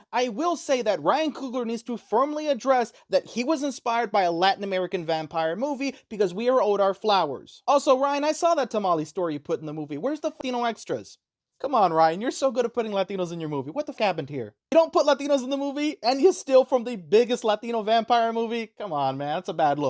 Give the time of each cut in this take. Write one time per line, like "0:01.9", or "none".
0:10.4
0:14.0